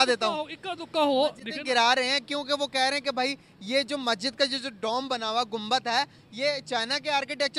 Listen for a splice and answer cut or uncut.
uncut